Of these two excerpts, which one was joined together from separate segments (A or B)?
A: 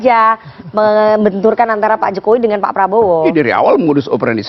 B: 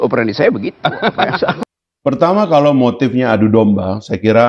B